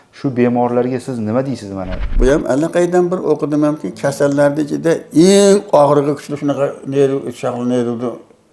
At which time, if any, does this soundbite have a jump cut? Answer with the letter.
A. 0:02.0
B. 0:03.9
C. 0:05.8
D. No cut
A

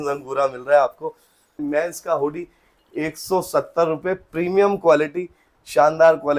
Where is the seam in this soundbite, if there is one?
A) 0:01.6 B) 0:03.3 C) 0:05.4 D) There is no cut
A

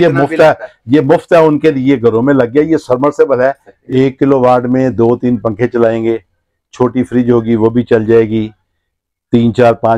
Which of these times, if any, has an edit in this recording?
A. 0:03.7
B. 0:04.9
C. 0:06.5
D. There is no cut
A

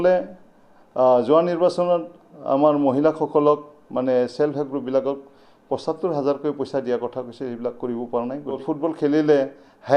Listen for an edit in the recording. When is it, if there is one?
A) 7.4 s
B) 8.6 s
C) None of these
B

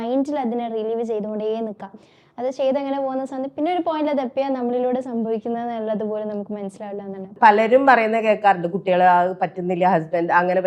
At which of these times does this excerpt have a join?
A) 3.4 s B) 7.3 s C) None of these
B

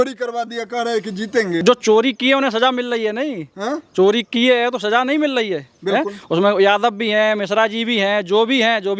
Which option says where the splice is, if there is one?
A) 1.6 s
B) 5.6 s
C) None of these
A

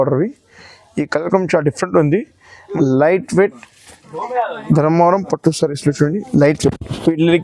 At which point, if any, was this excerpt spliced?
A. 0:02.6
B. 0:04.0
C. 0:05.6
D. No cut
A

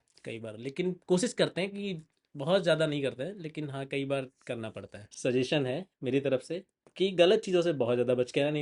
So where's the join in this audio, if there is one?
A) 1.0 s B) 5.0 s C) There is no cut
B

